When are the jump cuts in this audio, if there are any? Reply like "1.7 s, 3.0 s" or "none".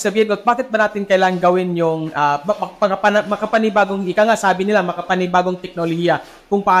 none